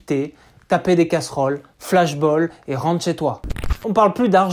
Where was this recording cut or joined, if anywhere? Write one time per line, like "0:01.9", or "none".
0:03.4